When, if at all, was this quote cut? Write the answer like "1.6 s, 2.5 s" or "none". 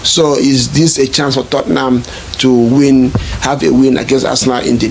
none